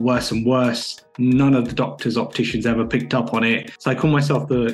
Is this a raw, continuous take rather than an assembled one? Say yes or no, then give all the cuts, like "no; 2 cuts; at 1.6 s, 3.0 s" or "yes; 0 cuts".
no; 1 cut; at 3.7 s